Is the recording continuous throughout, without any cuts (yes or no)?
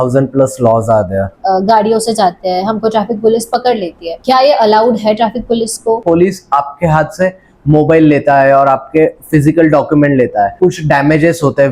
no